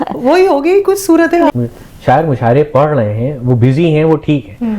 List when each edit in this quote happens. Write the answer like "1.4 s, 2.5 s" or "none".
1.5 s